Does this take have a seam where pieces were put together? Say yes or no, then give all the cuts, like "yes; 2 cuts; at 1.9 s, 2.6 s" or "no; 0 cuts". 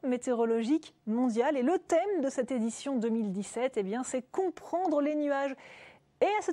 no; 0 cuts